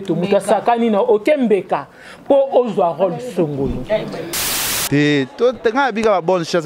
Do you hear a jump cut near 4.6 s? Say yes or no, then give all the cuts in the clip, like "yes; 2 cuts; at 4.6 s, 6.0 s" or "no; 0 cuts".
yes; 1 cut; at 4.6 s